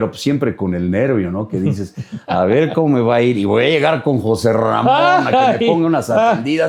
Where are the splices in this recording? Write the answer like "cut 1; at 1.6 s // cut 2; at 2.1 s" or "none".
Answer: none

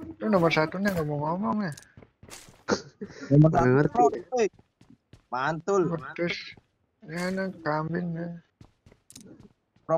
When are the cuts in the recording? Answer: none

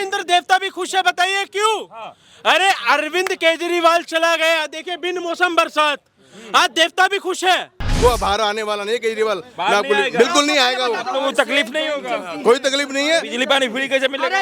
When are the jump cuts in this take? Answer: cut 1; at 7.9 s

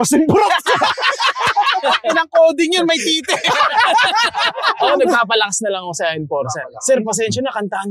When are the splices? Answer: cut 1; at 1.8 s // cut 2; at 4.8 s

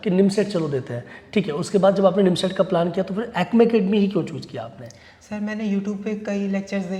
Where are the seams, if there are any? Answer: none

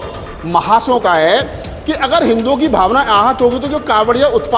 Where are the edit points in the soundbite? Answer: cut 1; at 1.0 s

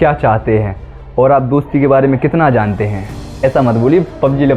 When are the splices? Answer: cut 1; at 3.4 s

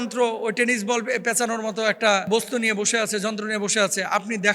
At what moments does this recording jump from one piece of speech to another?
cut 1; at 2.3 s

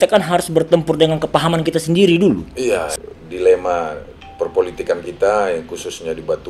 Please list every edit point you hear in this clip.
cut 1; at 2.9 s

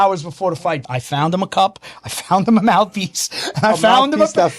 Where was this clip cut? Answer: cut 1; at 0.9 s

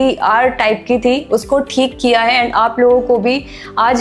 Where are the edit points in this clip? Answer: none

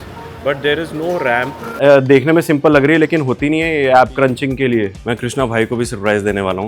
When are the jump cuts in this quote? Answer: cut 1; at 1.7 s // cut 2; at 5.0 s

